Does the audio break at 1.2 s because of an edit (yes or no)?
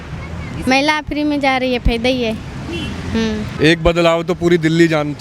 no